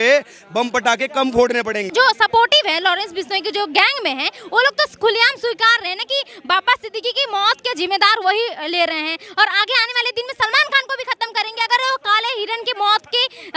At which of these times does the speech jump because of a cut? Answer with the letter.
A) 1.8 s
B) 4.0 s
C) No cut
C